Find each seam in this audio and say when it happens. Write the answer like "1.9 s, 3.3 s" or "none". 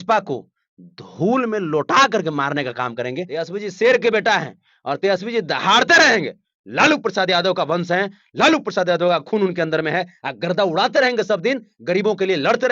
3.3 s